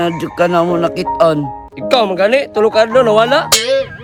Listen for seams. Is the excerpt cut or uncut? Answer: uncut